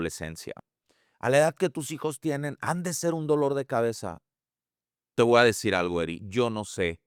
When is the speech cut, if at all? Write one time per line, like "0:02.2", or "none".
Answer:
none